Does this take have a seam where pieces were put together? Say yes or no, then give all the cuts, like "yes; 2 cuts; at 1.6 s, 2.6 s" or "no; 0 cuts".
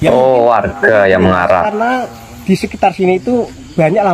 no; 0 cuts